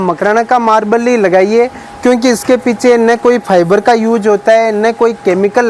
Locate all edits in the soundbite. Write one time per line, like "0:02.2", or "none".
none